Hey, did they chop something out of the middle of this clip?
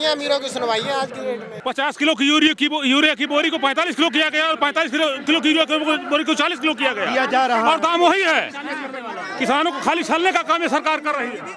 yes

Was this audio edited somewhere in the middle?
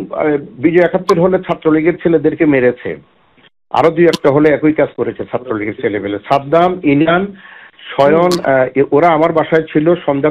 no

